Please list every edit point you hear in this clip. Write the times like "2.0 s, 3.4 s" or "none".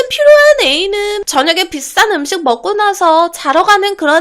1.2 s